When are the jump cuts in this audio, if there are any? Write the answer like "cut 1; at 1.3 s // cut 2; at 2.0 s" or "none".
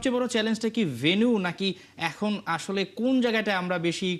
none